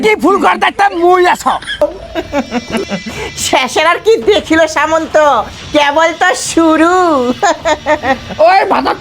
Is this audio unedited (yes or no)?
no